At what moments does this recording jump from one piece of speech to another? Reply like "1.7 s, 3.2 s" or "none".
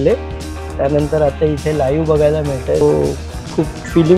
2.8 s

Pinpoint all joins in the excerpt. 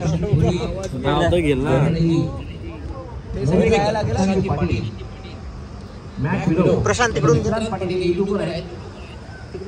none

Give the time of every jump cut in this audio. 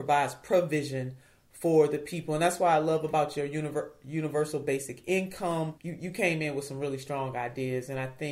5.8 s

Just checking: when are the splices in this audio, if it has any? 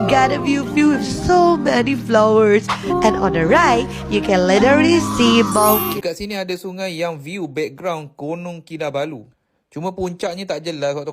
5.9 s

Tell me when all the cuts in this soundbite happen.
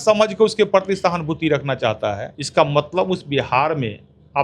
2.3 s

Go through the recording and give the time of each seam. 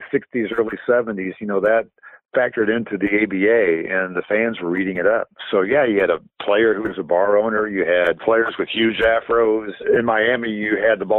8.2 s, 9.8 s

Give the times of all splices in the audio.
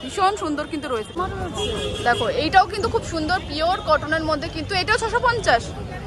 none

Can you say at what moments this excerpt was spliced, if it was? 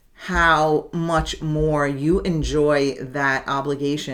none

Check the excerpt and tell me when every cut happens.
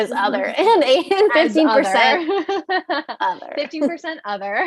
none

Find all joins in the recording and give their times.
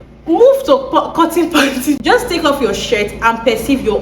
2.0 s

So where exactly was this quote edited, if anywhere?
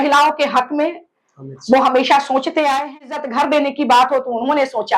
3.2 s

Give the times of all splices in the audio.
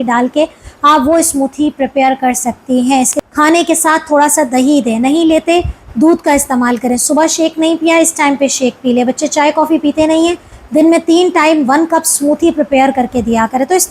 3.2 s

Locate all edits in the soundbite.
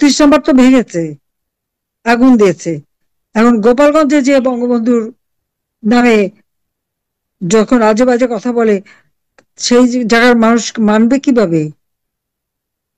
none

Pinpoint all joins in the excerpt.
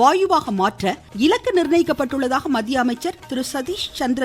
1.0 s, 3.2 s

